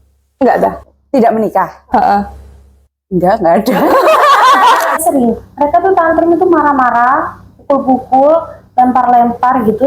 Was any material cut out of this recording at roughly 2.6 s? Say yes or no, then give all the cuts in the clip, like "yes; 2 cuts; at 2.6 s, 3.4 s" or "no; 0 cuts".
no; 1 cut; at 5.0 s